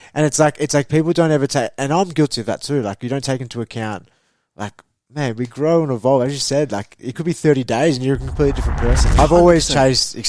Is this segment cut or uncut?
cut